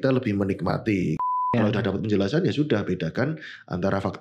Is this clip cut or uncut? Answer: cut